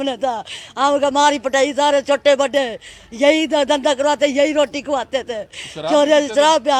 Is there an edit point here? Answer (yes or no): no